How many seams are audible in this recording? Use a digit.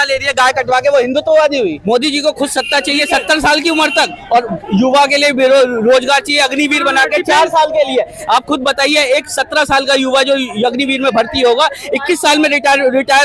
1